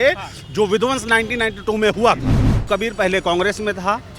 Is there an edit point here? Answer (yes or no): yes